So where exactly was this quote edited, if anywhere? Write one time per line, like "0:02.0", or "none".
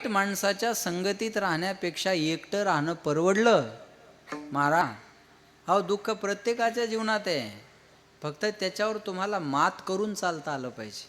0:04.8